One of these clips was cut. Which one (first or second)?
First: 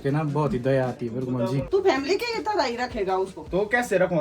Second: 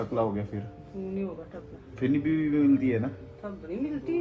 first